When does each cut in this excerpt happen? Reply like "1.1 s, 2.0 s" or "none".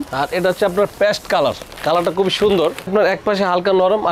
2.9 s